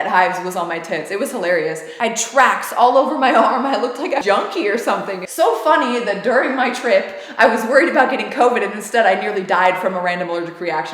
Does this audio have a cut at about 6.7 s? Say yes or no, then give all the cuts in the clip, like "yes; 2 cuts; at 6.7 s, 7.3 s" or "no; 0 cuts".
no; 3 cuts; at 1.9 s, 4.2 s, 5.2 s